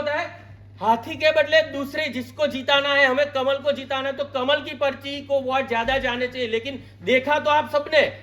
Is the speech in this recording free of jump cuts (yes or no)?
yes